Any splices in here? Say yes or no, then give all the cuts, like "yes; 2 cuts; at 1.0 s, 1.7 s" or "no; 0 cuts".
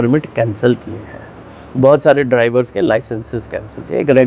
no; 0 cuts